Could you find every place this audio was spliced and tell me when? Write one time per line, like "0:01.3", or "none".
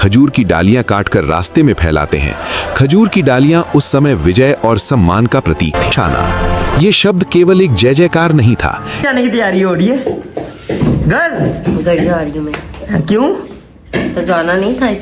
0:05.9
0:09.1